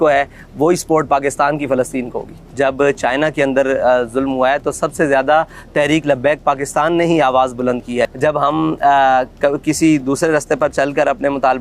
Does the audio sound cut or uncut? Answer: cut